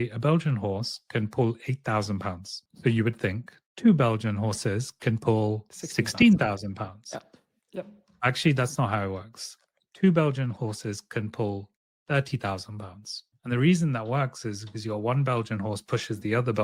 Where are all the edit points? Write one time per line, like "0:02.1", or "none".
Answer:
none